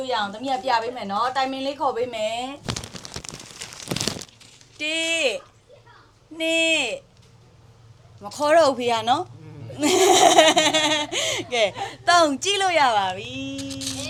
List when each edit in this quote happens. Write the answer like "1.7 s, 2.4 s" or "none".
none